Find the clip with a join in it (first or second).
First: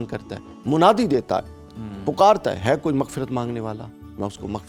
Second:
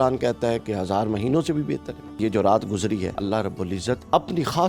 second